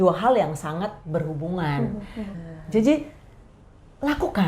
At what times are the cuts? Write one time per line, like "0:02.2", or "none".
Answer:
0:02.3